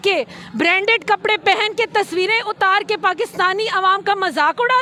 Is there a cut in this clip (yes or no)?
no